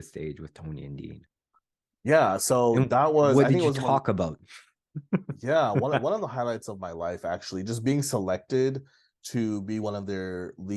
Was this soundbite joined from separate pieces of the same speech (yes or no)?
no